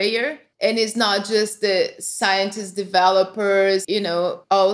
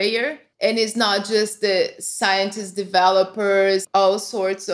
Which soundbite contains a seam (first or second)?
second